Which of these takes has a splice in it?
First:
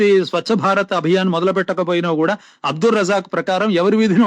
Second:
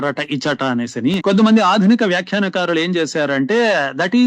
second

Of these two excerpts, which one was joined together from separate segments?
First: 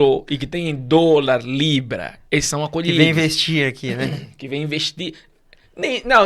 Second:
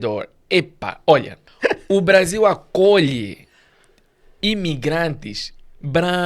second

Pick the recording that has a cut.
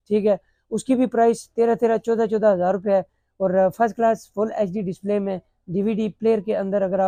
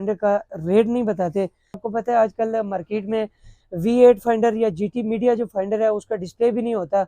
second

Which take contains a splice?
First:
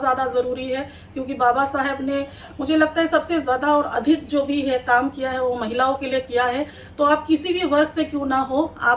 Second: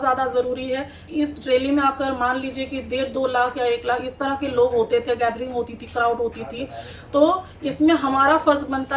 second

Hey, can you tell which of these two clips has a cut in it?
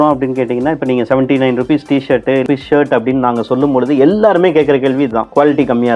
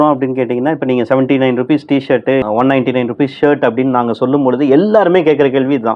first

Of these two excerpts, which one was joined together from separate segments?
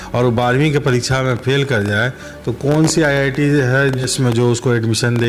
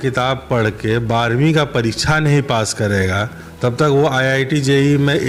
first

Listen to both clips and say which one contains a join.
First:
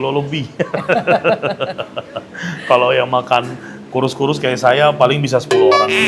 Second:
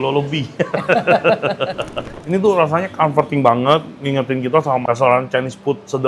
second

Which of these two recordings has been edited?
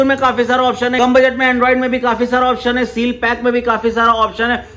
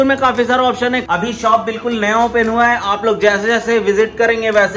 second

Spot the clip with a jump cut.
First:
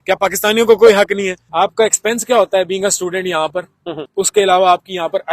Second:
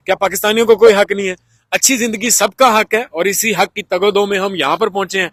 first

